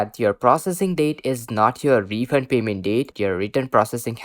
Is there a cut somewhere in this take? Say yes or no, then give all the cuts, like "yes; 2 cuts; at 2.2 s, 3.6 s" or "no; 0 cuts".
yes; 1 cut; at 3.1 s